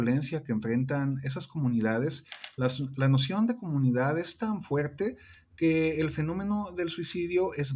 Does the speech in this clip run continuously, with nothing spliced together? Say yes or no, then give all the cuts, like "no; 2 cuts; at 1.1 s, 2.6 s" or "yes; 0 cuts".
yes; 0 cuts